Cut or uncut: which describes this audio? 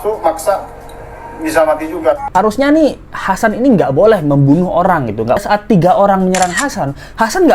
cut